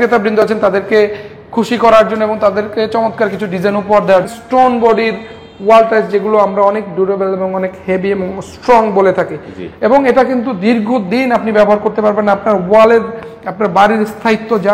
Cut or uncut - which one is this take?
cut